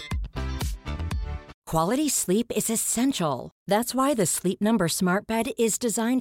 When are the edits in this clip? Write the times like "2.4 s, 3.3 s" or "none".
1.5 s